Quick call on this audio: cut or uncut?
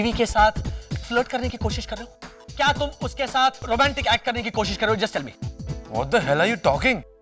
cut